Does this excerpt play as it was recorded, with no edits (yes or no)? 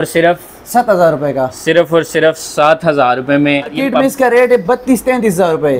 no